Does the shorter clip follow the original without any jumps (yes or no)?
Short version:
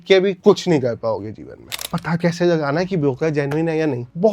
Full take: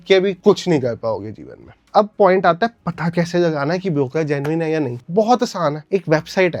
no